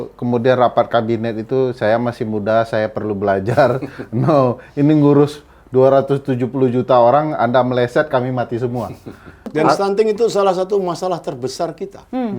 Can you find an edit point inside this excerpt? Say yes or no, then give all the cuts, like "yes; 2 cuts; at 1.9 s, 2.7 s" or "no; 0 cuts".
yes; 1 cut; at 9.4 s